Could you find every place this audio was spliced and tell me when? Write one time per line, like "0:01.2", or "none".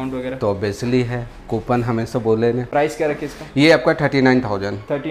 0:02.6